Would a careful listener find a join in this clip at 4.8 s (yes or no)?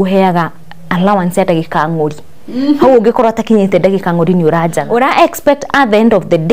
yes